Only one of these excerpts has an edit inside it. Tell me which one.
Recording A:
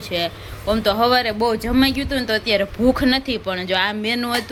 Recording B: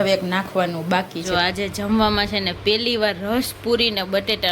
B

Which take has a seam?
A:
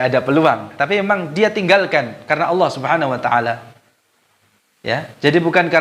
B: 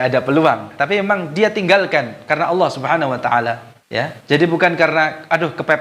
B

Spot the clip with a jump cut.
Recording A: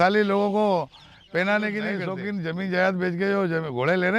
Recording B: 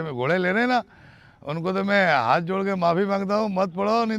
A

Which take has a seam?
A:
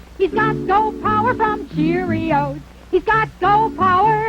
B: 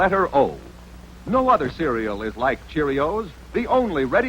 B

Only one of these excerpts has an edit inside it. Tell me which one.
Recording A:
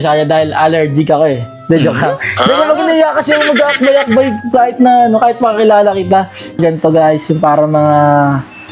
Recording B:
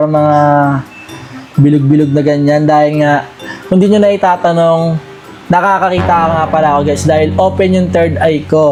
A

